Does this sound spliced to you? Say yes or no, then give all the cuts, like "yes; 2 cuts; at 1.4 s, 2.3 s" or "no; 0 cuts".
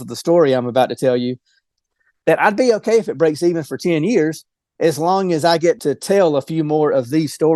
yes; 2 cuts; at 1.7 s, 5.8 s